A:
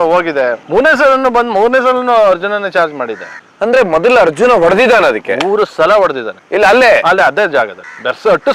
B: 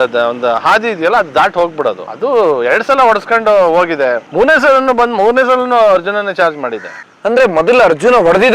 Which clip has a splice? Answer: B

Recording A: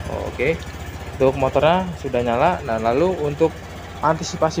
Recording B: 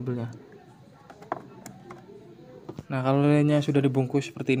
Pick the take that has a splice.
B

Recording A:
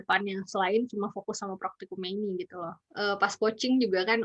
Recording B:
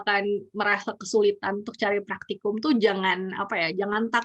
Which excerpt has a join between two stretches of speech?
A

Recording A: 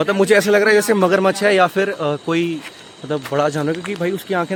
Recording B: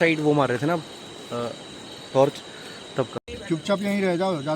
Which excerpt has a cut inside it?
B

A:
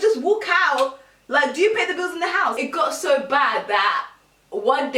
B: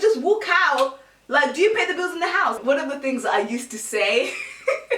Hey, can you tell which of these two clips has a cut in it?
A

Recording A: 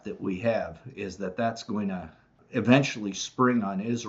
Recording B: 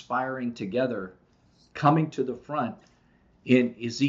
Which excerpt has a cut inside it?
A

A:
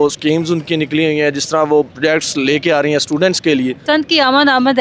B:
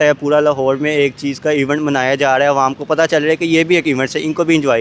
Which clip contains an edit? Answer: A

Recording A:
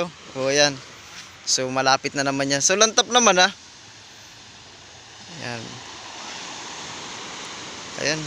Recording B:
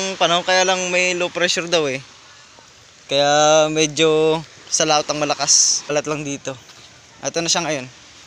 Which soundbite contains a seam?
B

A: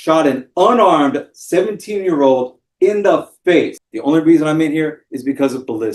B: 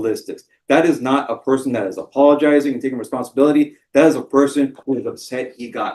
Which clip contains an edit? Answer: A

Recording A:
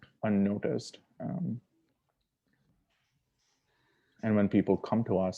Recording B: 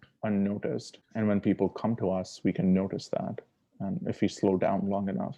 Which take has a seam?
B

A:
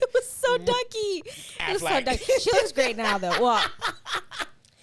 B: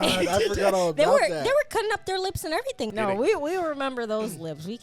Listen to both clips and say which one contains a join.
B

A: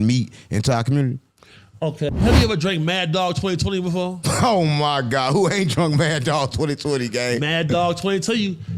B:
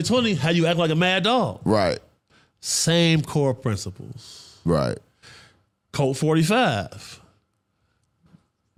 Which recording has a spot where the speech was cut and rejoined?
A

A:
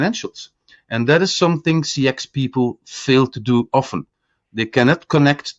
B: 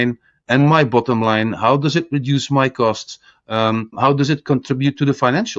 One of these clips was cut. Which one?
B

